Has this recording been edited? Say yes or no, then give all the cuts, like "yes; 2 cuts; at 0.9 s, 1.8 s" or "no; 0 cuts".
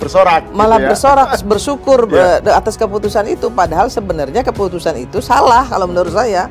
no; 0 cuts